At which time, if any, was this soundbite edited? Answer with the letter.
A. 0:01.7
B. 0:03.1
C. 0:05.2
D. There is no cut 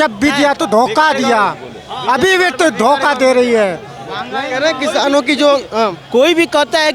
D